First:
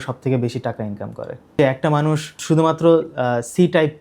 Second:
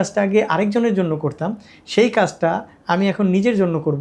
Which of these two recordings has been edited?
first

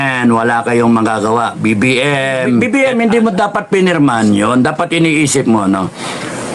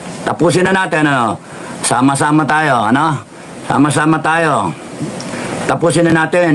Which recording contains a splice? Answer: first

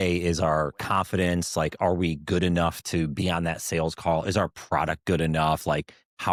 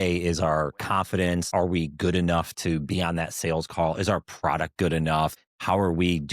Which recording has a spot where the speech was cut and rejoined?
second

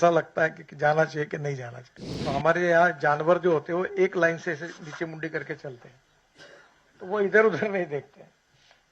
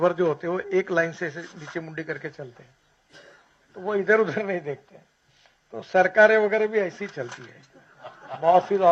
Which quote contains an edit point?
first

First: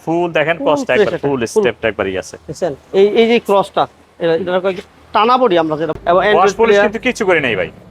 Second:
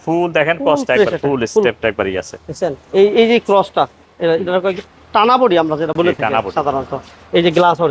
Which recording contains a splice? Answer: first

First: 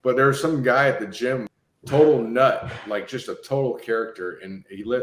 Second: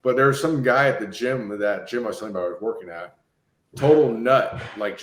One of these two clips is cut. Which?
first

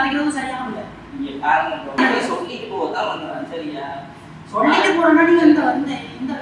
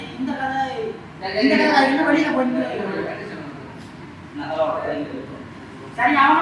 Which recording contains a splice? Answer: first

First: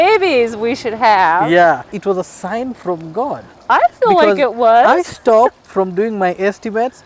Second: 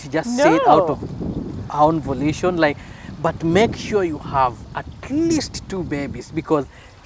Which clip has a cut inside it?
first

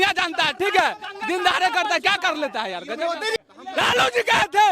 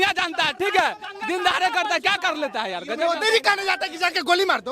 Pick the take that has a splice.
first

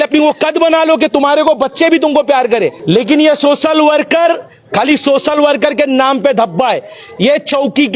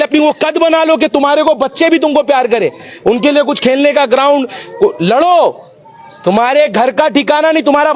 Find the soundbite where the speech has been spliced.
first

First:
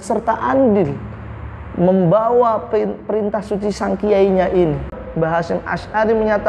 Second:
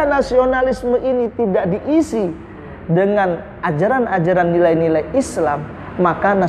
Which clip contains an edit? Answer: first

